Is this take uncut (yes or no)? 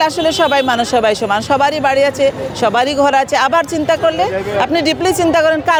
yes